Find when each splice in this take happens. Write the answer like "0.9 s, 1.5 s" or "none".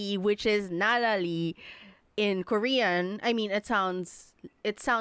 none